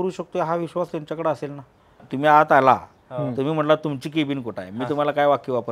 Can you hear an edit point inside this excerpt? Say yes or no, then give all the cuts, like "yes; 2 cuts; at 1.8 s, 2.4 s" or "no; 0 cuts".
yes; 1 cut; at 2.1 s